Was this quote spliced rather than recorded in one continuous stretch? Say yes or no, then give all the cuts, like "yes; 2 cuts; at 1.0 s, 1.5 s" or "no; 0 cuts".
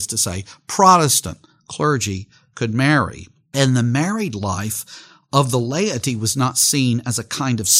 no; 0 cuts